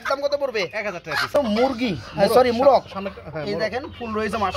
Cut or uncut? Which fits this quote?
cut